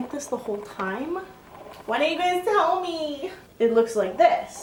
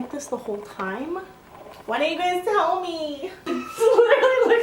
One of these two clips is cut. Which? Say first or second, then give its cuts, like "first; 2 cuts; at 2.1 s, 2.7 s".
second; 1 cut; at 3.4 s